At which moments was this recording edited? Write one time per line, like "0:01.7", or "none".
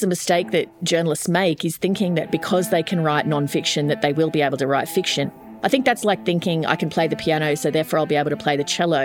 0:05.4

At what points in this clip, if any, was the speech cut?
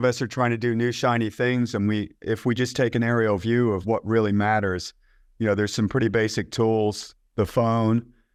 none

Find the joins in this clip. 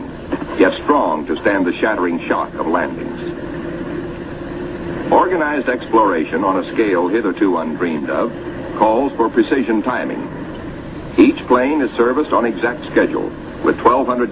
none

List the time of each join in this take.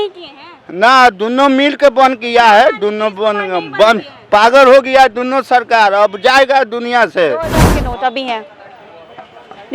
0:07.7

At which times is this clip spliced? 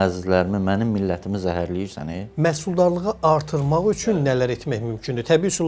0:02.2

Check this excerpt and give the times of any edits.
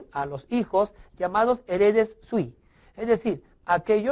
0:01.0

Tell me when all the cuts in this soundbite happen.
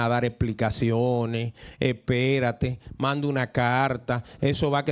none

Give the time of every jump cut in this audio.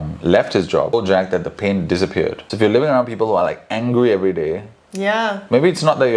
0:00.9
0:02.4

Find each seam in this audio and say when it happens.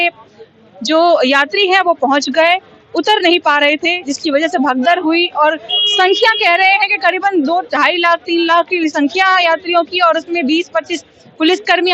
none

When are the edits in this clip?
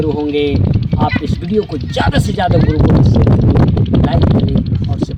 none

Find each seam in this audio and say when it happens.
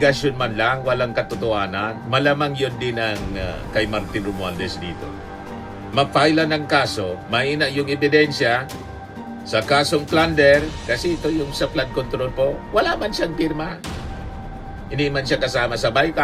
none

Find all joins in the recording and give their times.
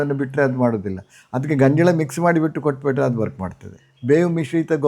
0:03.9

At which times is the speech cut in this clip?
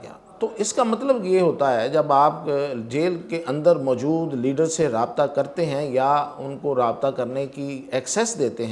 none

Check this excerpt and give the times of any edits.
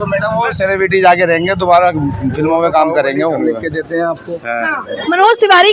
0:03.4
0:04.9

